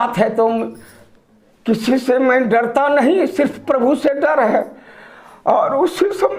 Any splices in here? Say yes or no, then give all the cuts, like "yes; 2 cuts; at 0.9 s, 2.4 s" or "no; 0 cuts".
no; 0 cuts